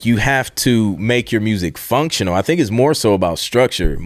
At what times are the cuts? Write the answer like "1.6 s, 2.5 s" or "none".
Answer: none

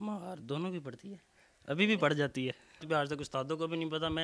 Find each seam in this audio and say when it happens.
2.7 s

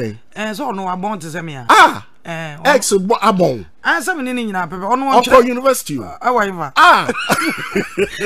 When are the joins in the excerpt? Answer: 1.5 s, 6.6 s

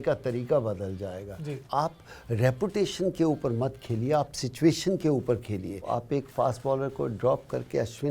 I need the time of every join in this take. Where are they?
1.7 s, 5.9 s

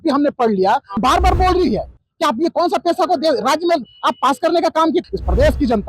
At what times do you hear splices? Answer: 1.0 s, 5.0 s

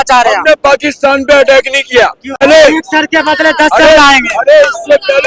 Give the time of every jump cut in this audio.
2.4 s

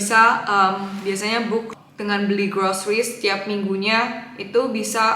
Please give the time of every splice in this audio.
1.7 s

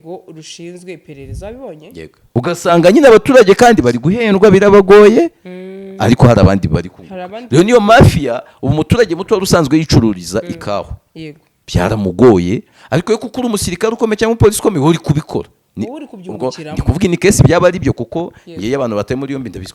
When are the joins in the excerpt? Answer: 2.4 s

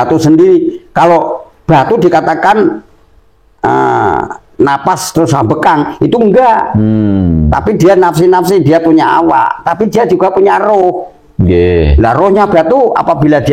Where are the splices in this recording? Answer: none

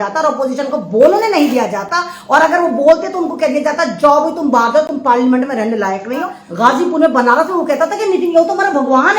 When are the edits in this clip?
6.4 s

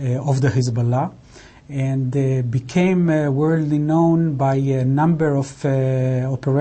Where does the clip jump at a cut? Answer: none

